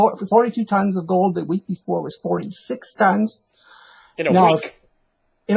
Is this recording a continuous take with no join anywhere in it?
no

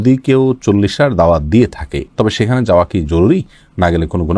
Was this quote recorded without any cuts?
yes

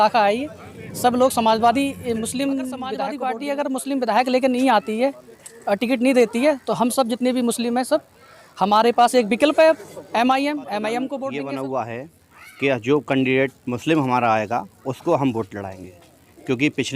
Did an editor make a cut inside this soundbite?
yes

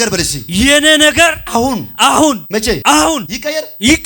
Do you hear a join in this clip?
yes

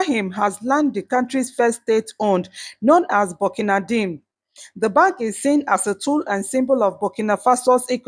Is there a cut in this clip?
no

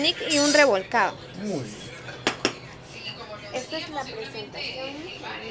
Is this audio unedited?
yes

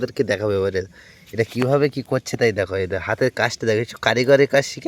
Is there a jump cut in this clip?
no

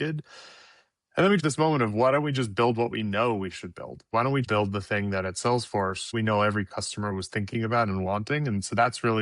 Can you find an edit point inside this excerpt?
yes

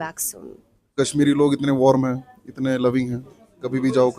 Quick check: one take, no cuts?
no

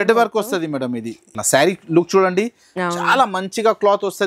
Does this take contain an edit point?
yes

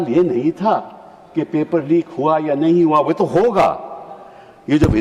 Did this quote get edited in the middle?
no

